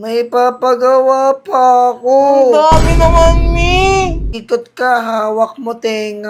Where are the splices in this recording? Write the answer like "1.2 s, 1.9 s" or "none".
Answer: 4.3 s